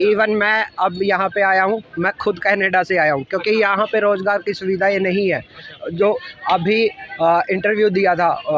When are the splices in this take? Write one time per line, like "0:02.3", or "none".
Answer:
none